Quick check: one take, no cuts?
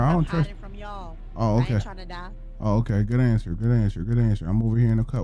yes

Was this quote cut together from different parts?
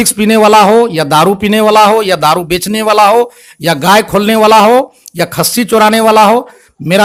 no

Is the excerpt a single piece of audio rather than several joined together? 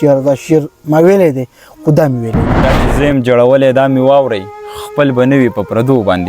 no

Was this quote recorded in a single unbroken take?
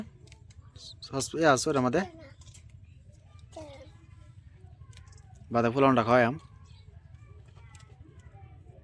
yes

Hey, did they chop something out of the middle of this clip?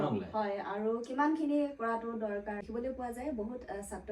yes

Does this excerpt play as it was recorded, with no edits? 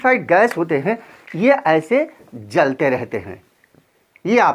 yes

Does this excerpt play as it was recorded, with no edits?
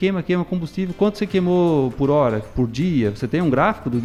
yes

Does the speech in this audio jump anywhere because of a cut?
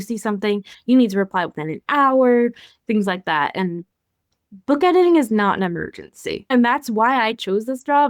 yes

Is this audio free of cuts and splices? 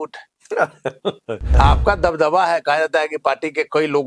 no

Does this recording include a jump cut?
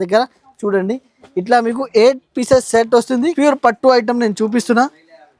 yes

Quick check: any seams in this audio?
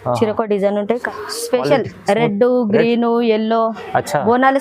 yes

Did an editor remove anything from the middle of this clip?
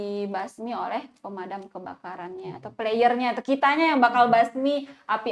no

